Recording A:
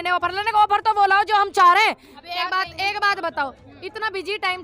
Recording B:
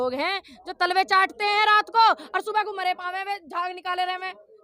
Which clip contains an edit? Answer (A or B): A